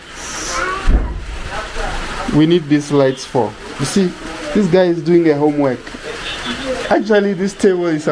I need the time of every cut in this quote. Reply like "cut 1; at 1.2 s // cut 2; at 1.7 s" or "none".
none